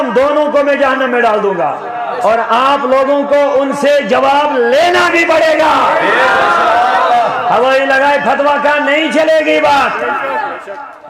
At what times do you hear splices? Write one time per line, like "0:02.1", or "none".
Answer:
0:02.0